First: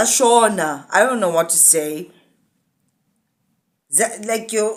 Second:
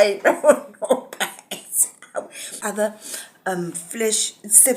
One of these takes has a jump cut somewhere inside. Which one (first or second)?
second